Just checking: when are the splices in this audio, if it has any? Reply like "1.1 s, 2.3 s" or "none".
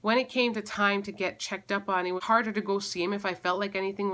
2.2 s